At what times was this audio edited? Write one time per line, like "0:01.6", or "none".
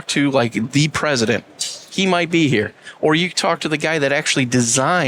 none